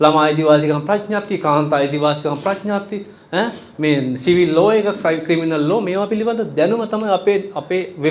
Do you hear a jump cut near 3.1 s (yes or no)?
no